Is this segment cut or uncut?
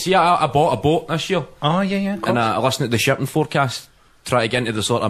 uncut